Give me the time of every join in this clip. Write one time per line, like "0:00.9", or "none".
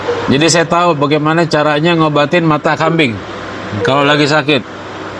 none